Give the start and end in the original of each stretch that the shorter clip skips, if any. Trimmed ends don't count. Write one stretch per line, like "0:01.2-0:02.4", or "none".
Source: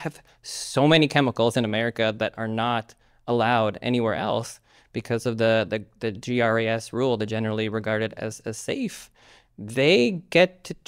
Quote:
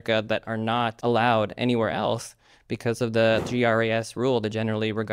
0:02.9-0:03.2
0:05.7-0:06.2